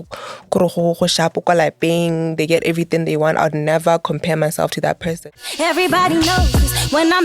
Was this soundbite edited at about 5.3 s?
yes; 1 cut; at 5.3 s

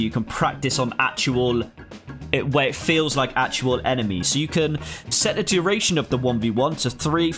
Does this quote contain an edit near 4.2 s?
yes; 1 cut; at 4.2 s

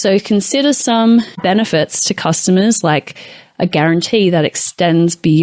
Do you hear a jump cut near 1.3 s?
yes; 1 cut; at 1.3 s

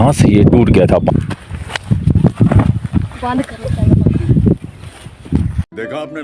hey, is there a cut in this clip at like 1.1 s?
yes; 1 cut; at 1.1 s

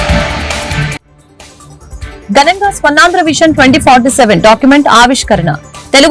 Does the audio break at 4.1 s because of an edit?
no; 1 cut; at 2.1 s

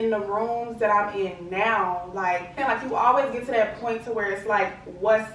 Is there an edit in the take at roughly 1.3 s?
no; 1 cut; at 2.5 s

